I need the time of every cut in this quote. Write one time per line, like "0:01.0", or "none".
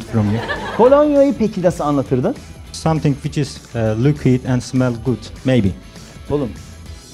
0:02.7
0:05.3